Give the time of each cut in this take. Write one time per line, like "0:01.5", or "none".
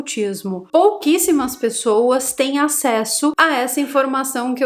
none